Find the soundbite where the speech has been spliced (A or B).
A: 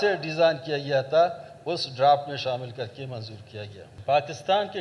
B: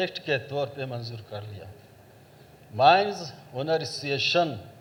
A